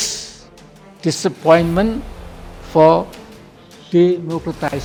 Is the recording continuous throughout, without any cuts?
yes; 0 cuts

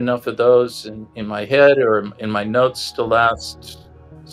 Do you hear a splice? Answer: no; 0 cuts

